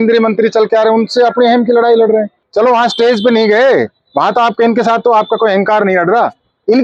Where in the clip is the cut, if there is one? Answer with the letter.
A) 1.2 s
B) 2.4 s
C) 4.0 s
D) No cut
B